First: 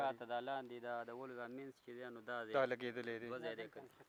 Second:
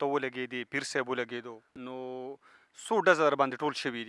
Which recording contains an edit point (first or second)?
second